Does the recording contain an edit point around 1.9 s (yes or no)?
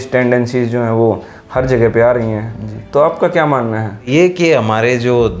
no